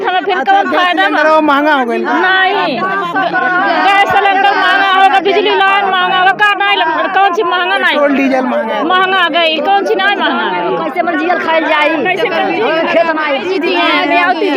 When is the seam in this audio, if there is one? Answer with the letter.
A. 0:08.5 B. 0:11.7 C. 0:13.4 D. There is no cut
C